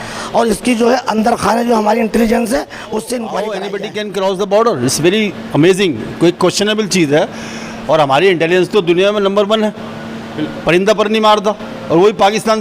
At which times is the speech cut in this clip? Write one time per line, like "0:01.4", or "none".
0:03.6